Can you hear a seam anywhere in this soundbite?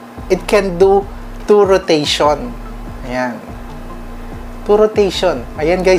no; 0 cuts

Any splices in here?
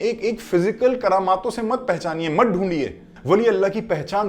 yes; 1 cut; at 3.1 s

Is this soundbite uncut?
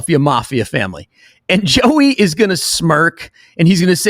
yes; 0 cuts

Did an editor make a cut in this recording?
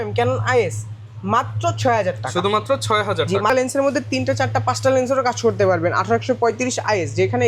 yes; 1 cut; at 3.5 s

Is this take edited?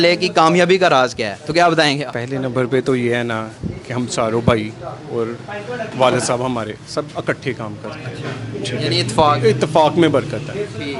no; 0 cuts

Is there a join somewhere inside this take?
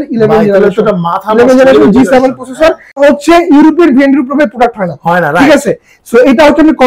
yes; 1 cut; at 3.0 s

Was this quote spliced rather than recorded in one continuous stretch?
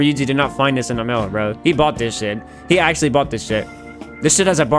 no; 0 cuts

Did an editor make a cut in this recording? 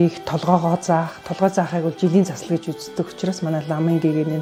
no; 0 cuts

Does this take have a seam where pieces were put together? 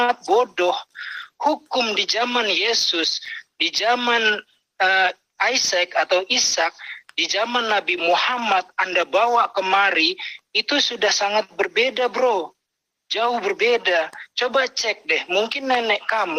no; 0 cuts

